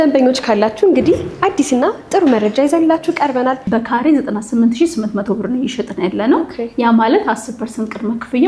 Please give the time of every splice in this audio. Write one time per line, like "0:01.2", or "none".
0:03.6